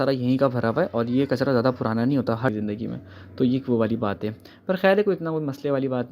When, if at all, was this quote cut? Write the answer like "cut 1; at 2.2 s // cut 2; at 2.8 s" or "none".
cut 1; at 2.5 s